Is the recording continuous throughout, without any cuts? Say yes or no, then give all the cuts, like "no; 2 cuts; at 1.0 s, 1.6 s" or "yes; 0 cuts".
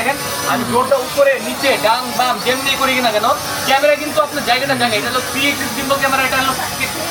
yes; 0 cuts